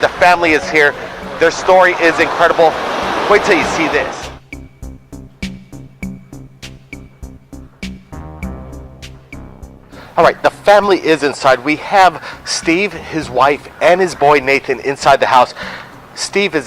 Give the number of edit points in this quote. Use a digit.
1